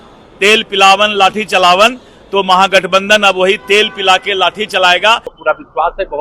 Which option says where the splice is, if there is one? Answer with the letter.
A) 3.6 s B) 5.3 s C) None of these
B